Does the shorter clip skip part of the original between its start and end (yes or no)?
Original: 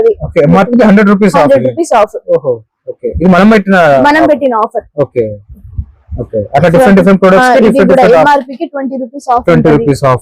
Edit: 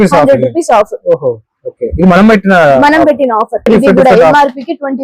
yes